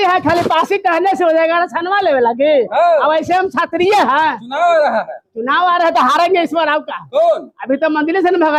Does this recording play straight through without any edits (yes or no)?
yes